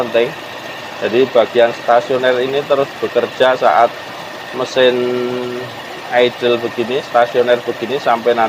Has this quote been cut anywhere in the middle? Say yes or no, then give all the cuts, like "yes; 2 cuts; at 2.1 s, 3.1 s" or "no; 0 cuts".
no; 0 cuts